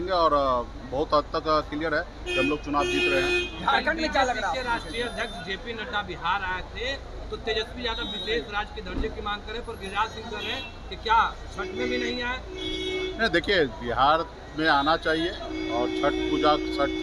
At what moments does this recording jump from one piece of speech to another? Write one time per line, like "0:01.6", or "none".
none